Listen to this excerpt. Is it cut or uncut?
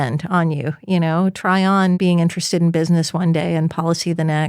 cut